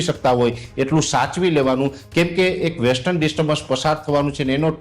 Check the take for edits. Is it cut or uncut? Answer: uncut